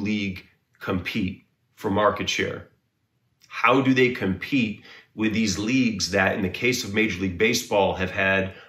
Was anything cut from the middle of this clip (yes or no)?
no